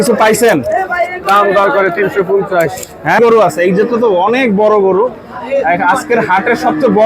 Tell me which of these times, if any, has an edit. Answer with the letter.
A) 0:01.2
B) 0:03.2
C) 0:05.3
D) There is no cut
B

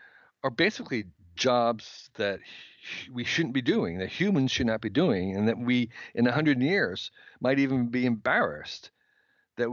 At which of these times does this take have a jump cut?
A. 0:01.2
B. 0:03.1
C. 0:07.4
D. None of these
A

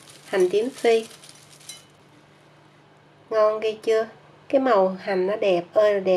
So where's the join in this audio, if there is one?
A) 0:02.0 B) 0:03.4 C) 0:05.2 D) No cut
A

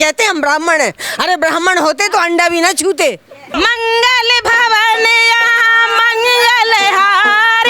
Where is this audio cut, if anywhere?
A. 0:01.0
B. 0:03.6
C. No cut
B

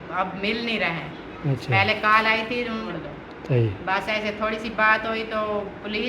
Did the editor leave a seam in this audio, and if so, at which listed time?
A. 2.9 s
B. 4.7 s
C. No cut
A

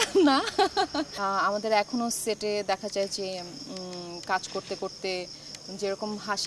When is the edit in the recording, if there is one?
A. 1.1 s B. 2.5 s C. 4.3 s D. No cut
A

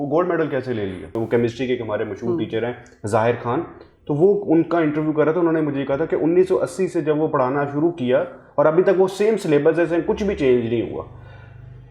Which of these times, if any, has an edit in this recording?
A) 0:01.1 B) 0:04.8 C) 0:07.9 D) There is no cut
A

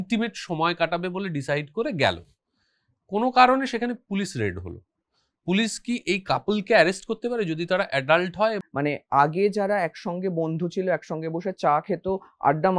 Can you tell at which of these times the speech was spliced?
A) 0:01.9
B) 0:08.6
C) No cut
B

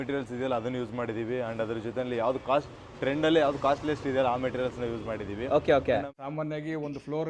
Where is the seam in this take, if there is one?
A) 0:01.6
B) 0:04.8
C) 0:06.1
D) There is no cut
C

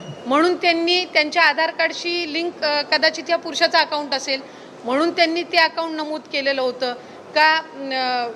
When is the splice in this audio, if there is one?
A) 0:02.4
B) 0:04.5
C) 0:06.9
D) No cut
D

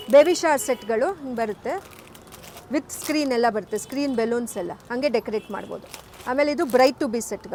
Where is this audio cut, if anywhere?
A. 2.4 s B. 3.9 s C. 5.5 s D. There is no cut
D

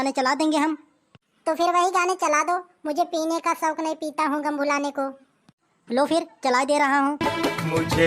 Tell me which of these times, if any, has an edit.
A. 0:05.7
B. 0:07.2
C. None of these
B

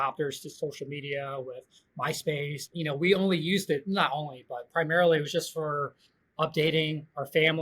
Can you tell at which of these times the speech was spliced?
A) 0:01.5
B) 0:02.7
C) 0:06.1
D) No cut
B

